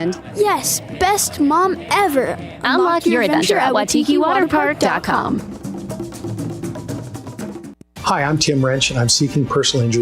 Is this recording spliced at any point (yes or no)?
yes